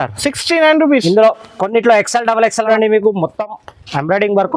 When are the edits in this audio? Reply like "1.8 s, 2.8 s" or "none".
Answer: 2.7 s